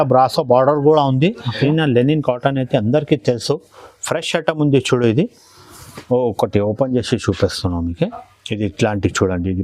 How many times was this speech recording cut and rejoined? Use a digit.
1